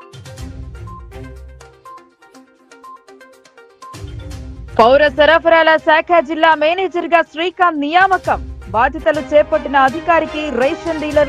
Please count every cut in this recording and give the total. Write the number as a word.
one